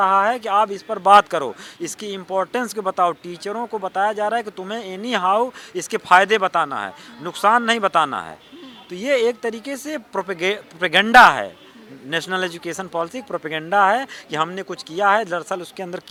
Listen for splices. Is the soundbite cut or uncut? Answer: uncut